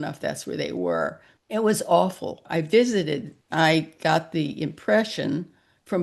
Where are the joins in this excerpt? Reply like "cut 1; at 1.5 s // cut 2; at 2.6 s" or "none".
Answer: cut 1; at 1.3 s // cut 2; at 2.4 s // cut 3; at 3.4 s